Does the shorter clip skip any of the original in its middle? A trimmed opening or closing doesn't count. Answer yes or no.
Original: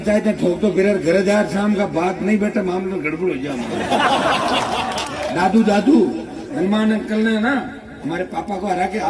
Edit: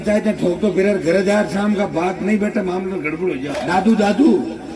yes